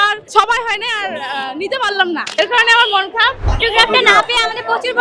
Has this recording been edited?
yes; 2 cuts; at 2.3 s, 3.5 s

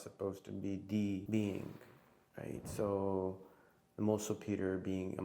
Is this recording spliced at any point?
yes; 1 cut; at 1.2 s

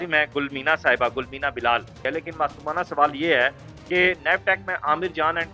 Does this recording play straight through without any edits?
no; 1 cut; at 1.9 s

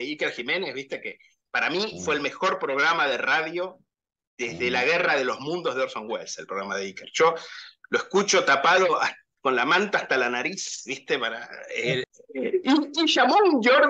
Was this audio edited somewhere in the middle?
yes; 1 cut; at 12.0 s

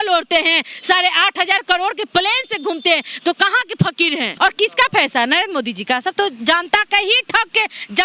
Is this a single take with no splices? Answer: no; 1 cut; at 4.3 s

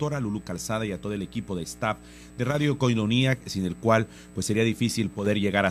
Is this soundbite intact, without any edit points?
no; 1 cut; at 4.1 s

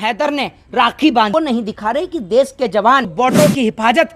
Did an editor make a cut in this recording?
yes; 2 cuts; at 1.3 s, 3.1 s

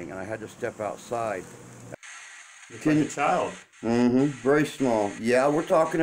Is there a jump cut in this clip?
yes; 1 cut; at 2.0 s

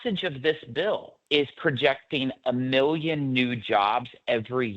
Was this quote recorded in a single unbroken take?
no; 1 cut; at 1.1 s

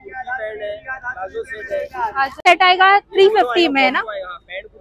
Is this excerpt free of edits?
no; 1 cut; at 2.4 s

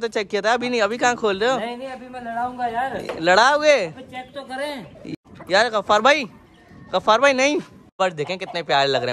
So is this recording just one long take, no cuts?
no; 2 cuts; at 5.1 s, 8.0 s

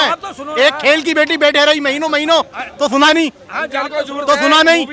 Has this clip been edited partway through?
no; 0 cuts

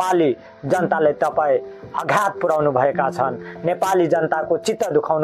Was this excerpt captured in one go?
yes; 0 cuts

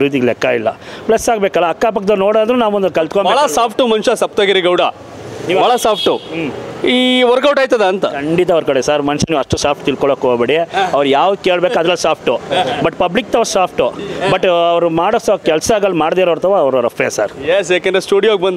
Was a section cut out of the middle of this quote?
no; 0 cuts

